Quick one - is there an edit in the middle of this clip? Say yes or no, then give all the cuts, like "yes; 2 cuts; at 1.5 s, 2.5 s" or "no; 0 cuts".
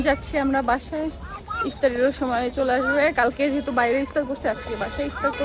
no; 0 cuts